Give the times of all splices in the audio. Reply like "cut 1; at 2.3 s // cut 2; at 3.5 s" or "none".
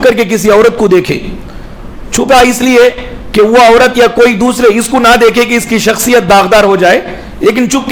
none